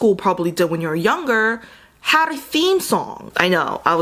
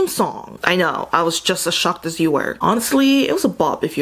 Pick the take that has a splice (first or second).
second